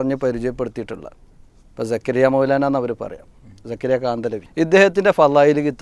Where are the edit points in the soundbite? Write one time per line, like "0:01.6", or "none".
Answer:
0:04.5

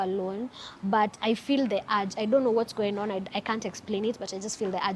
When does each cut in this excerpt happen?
none

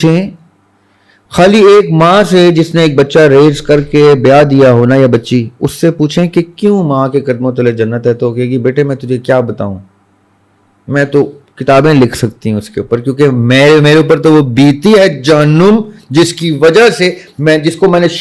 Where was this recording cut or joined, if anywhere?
none

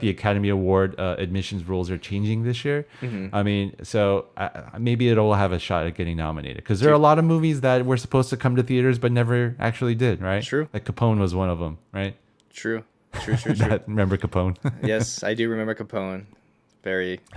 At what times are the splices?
none

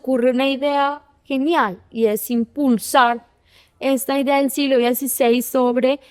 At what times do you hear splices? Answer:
none

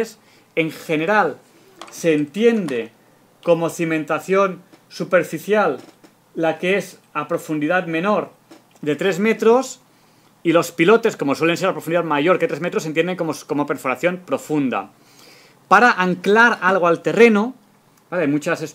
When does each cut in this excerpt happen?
none

